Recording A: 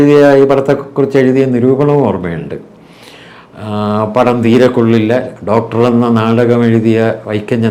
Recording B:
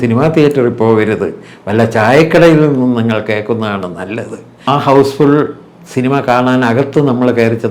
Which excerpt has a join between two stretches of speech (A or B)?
B